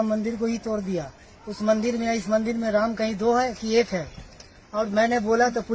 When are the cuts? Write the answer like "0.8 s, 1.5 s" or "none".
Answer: none